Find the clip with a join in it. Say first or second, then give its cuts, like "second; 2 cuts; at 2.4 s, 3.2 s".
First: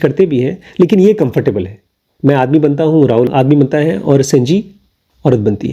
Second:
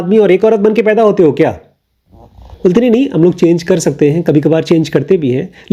first; 1 cut; at 3.3 s